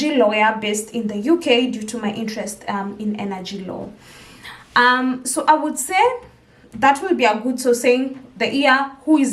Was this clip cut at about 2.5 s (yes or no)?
no